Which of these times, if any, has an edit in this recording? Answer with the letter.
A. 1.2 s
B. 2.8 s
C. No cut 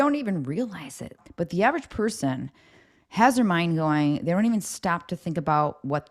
A